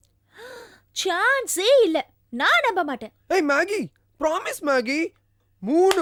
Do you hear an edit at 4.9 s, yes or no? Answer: no